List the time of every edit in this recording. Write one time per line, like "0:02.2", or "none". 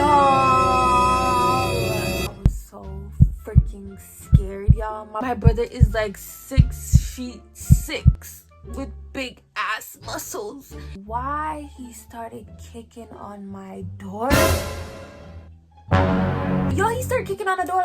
0:02.3
0:11.0
0:16.7